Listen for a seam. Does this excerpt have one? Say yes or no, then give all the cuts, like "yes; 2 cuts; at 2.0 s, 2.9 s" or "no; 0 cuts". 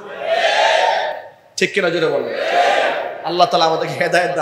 no; 0 cuts